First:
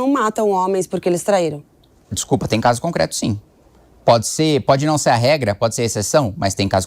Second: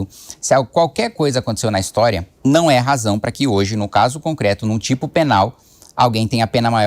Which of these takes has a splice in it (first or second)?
second